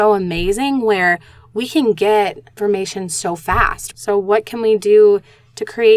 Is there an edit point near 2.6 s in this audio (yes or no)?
yes